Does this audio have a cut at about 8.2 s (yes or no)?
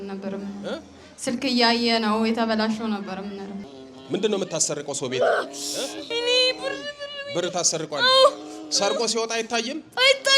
no